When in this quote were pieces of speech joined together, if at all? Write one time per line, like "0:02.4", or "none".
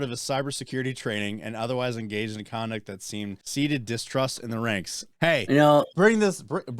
0:03.4
0:05.0